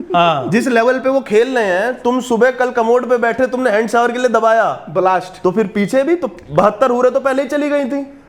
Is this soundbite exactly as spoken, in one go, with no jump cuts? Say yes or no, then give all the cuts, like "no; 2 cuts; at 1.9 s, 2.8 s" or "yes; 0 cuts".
yes; 0 cuts